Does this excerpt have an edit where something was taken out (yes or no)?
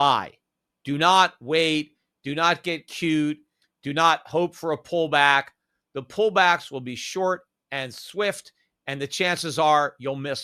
no